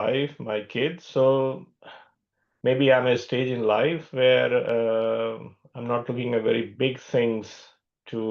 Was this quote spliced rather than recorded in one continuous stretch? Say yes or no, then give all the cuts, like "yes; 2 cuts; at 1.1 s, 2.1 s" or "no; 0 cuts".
yes; 1 cut; at 1.0 s